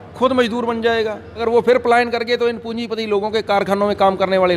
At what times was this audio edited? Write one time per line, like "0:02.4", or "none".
0:01.4